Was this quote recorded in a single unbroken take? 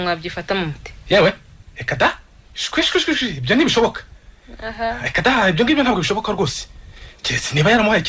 yes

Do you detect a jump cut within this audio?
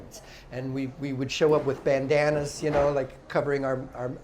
no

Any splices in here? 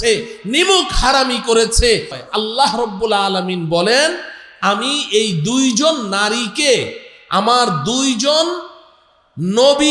yes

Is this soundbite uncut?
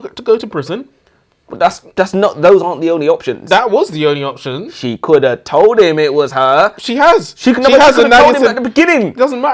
no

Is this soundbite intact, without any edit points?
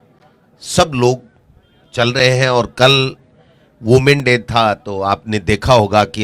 yes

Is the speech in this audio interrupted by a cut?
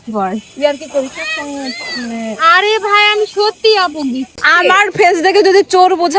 yes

